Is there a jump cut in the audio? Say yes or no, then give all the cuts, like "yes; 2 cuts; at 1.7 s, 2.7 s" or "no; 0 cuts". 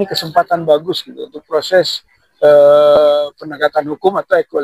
no; 0 cuts